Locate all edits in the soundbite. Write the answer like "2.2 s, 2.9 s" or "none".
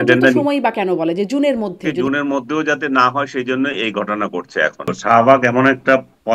1.9 s, 5.0 s